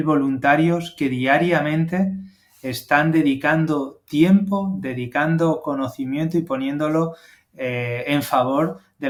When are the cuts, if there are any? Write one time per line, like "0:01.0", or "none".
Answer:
none